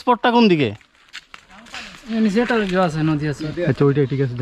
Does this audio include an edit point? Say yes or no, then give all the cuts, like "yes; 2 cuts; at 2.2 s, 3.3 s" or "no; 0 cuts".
no; 0 cuts